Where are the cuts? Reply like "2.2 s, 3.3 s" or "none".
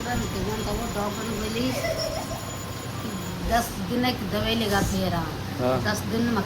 none

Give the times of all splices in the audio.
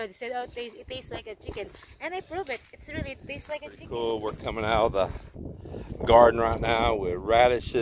3.9 s

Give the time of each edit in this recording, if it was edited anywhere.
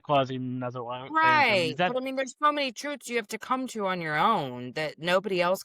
none

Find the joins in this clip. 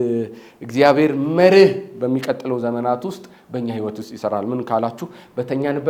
none

